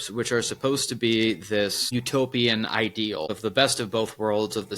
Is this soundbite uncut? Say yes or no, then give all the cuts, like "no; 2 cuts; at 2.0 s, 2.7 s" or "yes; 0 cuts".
no; 2 cuts; at 1.8 s, 3.4 s